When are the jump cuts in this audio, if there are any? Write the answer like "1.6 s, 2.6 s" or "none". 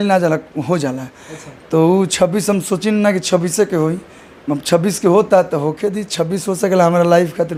none